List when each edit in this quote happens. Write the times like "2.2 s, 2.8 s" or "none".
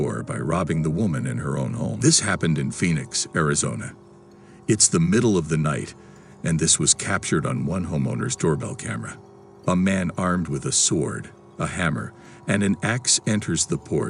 2.0 s